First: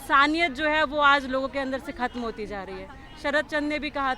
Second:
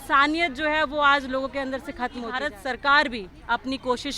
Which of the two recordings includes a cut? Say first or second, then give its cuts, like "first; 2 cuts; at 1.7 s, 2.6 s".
second; 1 cut; at 2.4 s